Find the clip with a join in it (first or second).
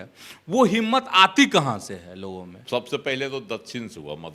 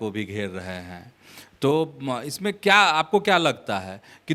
first